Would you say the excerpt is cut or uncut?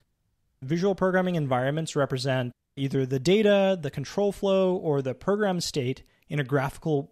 cut